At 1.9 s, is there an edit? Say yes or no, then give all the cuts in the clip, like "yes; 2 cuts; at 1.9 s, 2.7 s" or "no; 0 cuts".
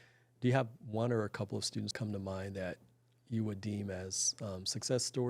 yes; 1 cut; at 1.9 s